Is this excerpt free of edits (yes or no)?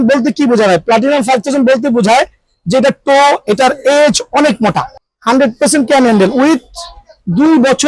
no